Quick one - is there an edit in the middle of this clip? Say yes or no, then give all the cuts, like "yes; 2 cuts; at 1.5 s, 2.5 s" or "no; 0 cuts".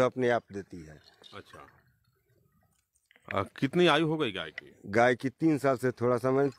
no; 0 cuts